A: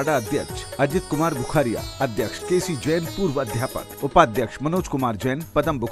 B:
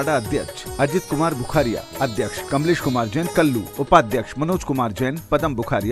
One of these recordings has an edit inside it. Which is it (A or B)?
B